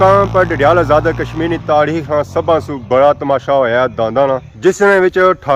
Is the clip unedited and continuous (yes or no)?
yes